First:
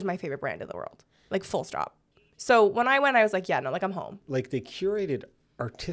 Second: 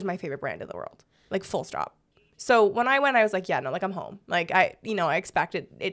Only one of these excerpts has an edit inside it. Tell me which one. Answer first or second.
first